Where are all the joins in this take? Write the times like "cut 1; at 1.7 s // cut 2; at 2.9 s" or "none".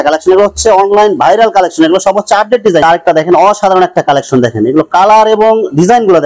cut 1; at 2.8 s